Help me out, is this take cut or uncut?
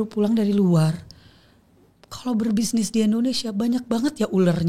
uncut